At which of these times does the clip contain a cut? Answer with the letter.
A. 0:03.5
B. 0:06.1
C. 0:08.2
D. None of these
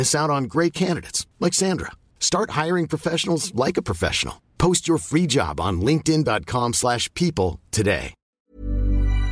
C